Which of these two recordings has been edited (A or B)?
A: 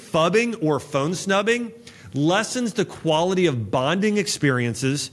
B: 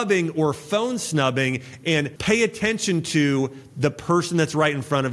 B